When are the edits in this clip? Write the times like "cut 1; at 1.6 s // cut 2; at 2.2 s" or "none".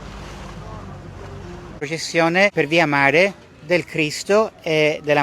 cut 1; at 1.8 s // cut 2; at 2.5 s